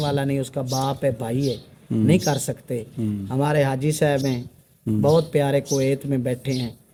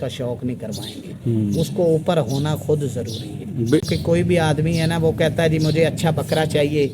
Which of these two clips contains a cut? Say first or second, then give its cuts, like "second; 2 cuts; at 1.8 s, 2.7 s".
second; 1 cut; at 3.8 s